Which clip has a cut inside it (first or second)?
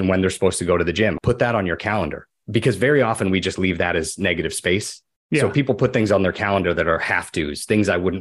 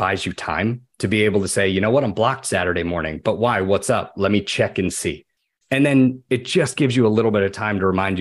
first